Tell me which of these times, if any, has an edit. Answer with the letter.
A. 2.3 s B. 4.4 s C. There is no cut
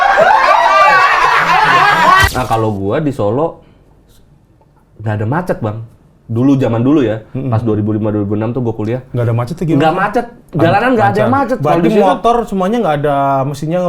A